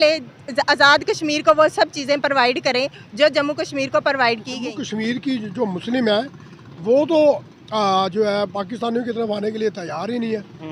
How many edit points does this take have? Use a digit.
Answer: 1